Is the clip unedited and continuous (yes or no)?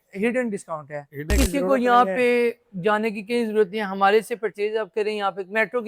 no